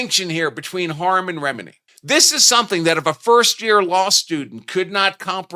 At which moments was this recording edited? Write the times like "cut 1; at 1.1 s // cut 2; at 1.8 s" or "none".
none